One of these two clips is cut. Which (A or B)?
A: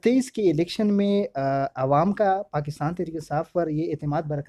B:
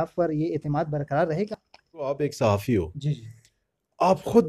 B